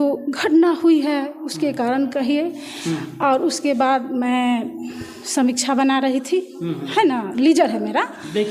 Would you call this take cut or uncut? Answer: uncut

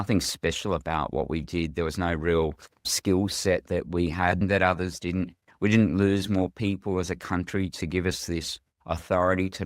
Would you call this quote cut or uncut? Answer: cut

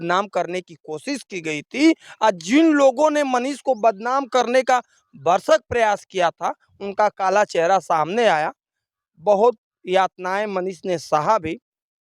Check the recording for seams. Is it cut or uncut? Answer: uncut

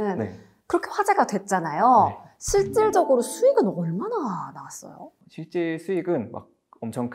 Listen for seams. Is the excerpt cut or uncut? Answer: uncut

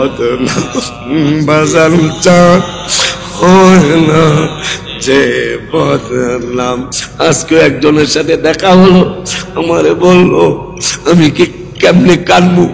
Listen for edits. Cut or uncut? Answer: cut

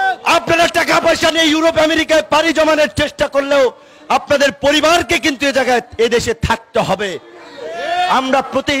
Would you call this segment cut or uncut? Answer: uncut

